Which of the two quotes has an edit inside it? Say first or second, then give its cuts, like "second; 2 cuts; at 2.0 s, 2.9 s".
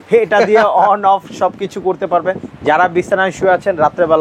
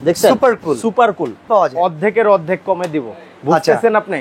second; 1 cut; at 1.3 s